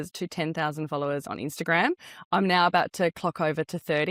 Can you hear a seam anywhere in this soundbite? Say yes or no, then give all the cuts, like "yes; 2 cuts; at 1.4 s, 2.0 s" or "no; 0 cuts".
no; 0 cuts